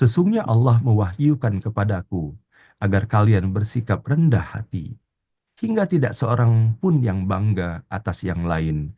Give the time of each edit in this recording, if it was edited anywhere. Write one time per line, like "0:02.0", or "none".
none